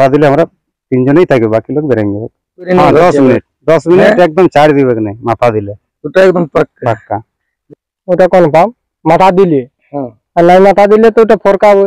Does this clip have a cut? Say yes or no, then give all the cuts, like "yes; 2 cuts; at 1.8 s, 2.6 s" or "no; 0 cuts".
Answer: yes; 2 cuts; at 2.7 s, 7.6 s